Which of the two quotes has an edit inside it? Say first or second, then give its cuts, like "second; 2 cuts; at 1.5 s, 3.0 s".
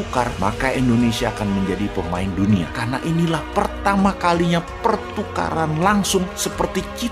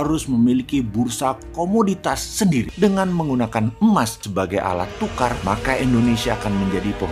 second; 1 cut; at 2.7 s